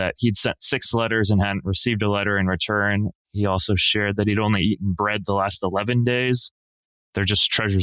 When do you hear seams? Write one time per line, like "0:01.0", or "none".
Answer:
0:06.8